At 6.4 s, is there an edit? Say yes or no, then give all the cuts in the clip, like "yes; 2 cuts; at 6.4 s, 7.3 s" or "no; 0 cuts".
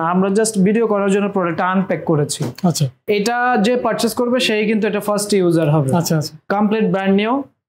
yes; 2 cuts; at 3.0 s, 6.4 s